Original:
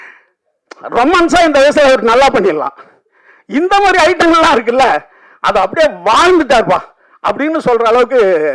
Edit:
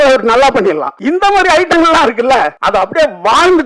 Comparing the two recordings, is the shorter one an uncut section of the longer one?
no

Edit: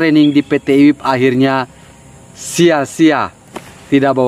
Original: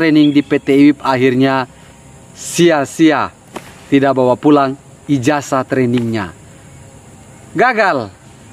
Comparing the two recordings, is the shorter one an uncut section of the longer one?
yes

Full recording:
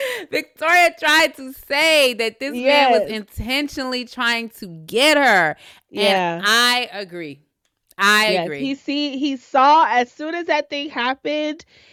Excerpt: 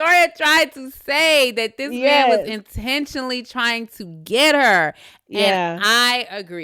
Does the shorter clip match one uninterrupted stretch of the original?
yes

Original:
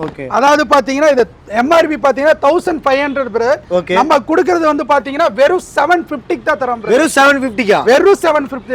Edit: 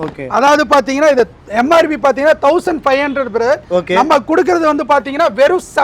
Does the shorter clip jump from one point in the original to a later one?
no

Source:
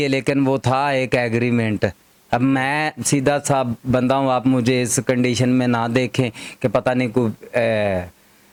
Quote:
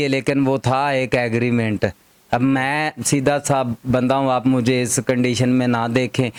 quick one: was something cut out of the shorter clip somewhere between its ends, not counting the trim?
no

